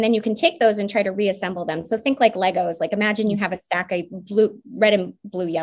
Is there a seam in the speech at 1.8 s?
no; 0 cuts

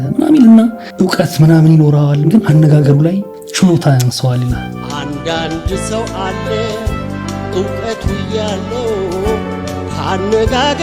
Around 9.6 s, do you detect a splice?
no; 0 cuts

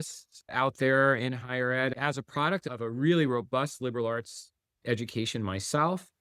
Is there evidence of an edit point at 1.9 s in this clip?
yes; 1 cut; at 1.9 s

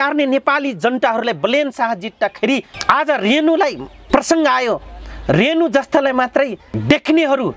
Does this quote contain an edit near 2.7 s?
yes; 3 cuts; at 2.7 s, 3.9 s, 6.7 s

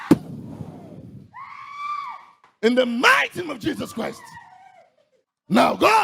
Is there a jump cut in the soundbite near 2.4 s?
yes; 1 cut; at 2.4 s

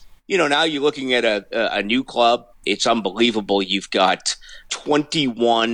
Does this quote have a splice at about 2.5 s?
yes; 2 cuts; at 2.5 s, 4.7 s

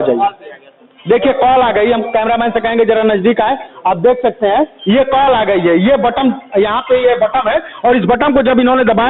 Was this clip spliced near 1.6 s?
no; 0 cuts

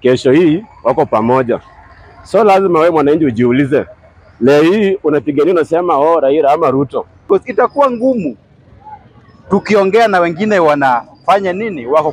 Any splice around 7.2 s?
yes; 1 cut; at 7.2 s

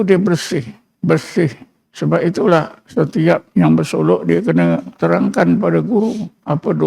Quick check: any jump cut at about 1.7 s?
no; 2 cuts; at 3.5 s, 4.9 s

